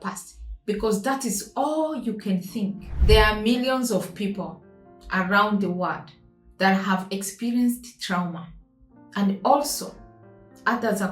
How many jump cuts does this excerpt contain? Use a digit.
1